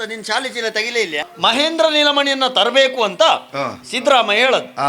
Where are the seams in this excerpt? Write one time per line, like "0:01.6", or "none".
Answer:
0:01.2